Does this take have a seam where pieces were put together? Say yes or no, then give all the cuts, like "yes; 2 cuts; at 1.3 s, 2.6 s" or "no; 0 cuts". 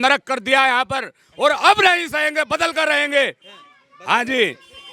no; 0 cuts